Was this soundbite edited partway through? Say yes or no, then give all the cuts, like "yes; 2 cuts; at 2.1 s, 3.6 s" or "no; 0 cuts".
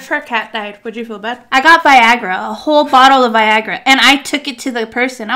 yes; 1 cut; at 1.3 s